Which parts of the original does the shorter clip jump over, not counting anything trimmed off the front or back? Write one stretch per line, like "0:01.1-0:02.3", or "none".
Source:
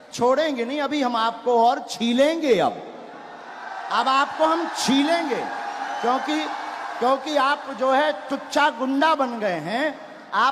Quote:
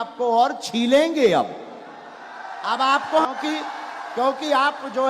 0:04.5-0:06.1

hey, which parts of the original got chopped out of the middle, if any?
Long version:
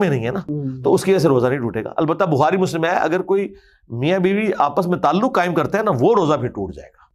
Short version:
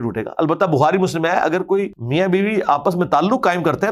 0:03.6-0:03.9

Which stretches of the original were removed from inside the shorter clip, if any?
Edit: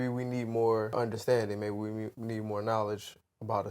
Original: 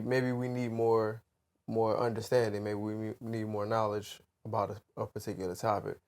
0:01.2-0:02.0

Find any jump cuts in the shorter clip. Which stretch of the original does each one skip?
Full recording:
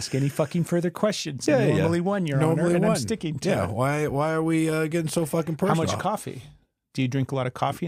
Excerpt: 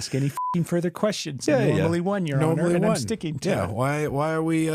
none

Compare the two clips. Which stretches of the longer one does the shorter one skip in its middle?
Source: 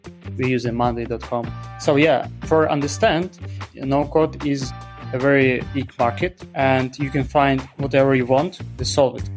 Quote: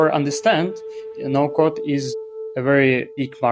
none

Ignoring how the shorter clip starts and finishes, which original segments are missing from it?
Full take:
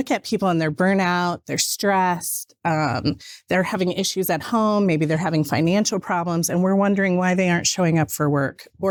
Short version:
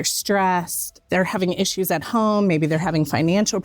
0:02.5-0:03.3

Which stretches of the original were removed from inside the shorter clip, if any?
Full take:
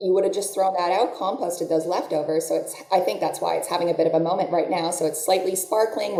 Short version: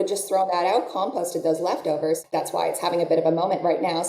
0:02.5-0:03.1

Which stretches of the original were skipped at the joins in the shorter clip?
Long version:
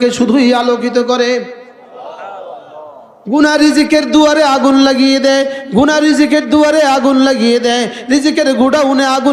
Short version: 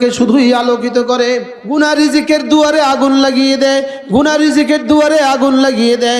0:01.6-0:03.2

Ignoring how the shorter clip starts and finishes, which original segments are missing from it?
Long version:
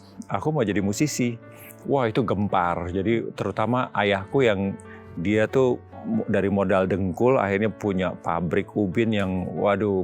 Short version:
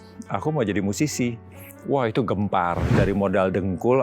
0:02.9-0:06.2

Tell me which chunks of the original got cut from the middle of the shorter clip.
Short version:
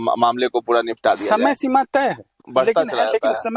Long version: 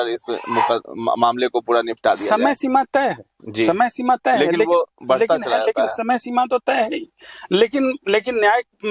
0:03.4-0:04.9

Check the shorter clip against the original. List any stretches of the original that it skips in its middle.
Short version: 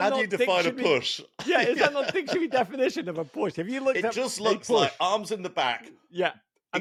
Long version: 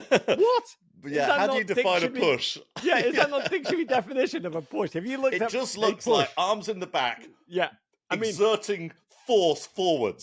none

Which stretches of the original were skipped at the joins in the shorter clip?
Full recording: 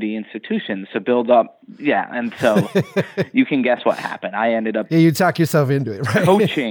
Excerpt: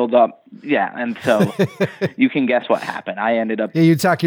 none

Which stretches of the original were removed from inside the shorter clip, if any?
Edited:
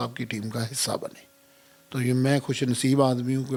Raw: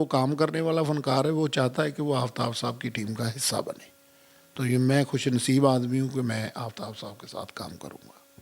none

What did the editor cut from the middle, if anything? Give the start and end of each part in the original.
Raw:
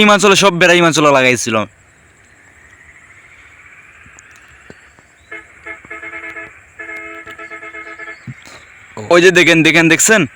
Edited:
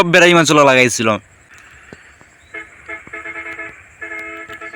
0:02.0-0:04.3

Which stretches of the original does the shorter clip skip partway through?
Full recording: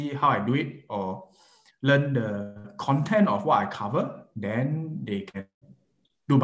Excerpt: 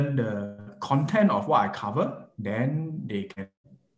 none

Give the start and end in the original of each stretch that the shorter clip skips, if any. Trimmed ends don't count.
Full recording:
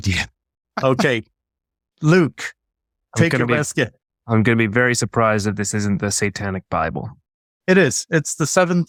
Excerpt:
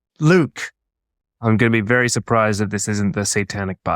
0:03.0-0:04.0

